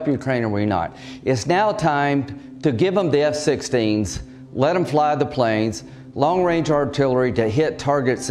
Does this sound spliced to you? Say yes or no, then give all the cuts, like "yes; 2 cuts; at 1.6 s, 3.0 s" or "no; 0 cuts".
no; 0 cuts